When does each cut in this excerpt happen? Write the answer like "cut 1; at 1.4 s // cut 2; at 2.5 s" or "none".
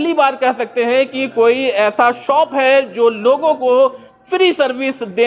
none